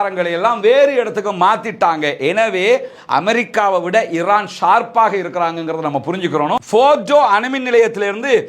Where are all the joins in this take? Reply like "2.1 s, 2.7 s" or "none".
6.6 s

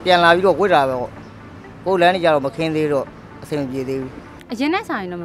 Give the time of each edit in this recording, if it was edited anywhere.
4.3 s

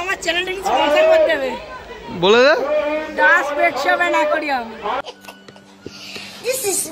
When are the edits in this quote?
5.0 s

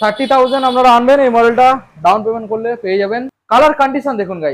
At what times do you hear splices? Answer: 3.3 s

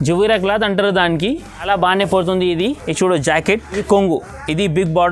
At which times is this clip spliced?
1.6 s, 2.8 s, 3.8 s

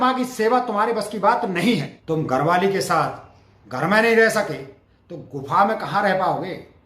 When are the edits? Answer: 1.9 s

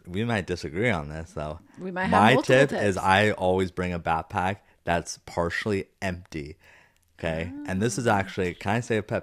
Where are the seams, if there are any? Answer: none

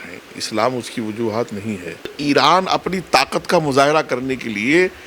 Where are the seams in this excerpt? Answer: 2.2 s

